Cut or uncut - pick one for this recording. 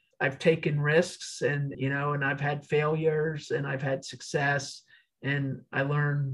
cut